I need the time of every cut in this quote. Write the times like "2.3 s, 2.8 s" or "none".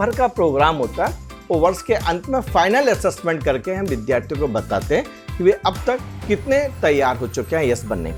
none